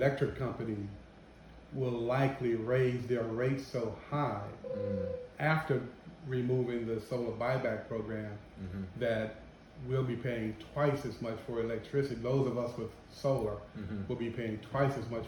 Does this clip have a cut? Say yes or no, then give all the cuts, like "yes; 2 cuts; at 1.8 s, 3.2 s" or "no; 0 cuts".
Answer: no; 0 cuts